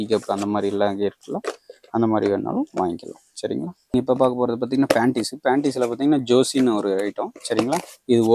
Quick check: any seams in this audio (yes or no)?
yes